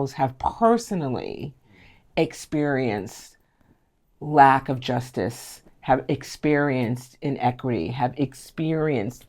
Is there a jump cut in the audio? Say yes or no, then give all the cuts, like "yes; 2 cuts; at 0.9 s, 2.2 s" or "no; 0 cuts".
no; 0 cuts